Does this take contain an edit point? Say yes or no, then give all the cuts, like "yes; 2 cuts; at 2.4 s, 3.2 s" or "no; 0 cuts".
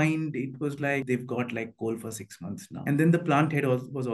yes; 2 cuts; at 1.0 s, 2.7 s